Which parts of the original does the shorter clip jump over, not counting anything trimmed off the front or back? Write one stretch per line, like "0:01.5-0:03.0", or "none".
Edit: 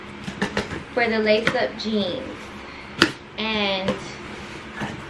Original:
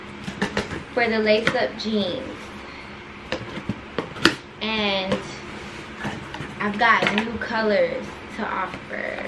0:02.9-0:04.1